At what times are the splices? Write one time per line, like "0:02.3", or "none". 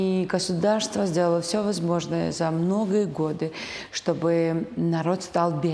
none

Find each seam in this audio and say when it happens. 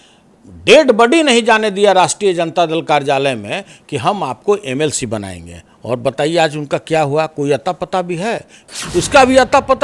0:08.7

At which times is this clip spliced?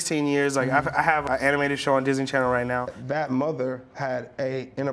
0:01.2
0:02.9

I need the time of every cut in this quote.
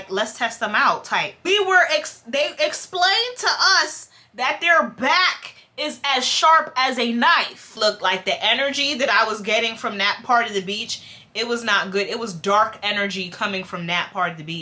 0:01.4
0:07.8

